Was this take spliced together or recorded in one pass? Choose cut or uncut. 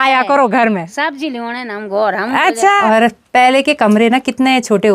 cut